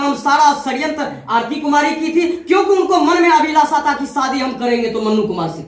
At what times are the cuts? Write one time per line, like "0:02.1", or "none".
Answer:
none